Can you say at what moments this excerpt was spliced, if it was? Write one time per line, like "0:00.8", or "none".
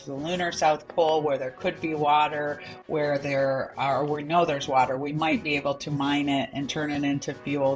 none